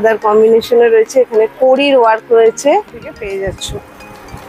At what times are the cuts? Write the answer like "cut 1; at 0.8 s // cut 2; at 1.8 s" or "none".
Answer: cut 1; at 3.1 s